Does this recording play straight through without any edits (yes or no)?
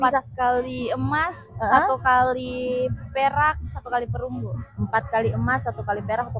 yes